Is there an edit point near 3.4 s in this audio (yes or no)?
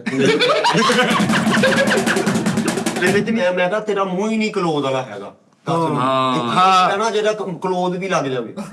yes